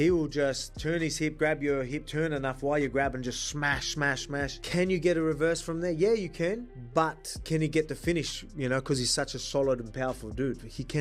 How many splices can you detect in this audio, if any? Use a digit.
0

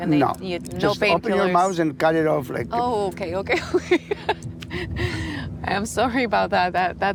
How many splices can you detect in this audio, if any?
0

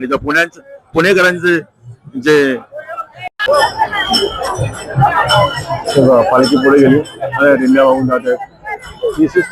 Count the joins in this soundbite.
1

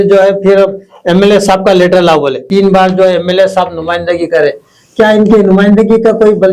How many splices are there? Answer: 1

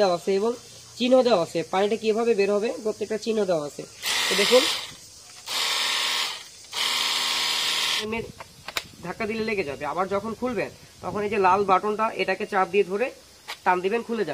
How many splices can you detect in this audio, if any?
1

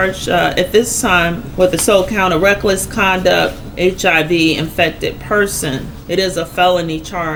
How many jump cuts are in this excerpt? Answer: 0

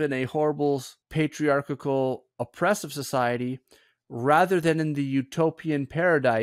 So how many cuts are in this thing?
1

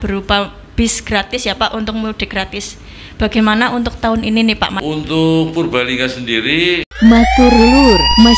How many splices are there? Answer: 2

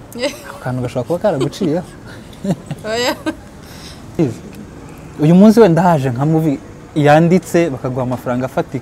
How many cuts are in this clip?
1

